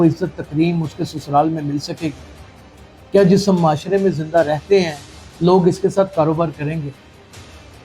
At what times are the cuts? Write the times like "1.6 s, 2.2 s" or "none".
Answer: none